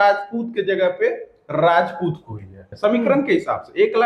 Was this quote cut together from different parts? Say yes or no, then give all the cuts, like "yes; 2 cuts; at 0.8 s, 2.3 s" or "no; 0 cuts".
yes; 1 cut; at 2.6 s